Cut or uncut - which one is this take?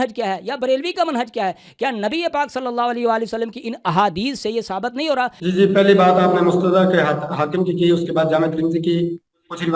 cut